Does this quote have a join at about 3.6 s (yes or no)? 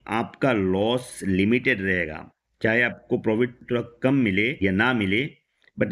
yes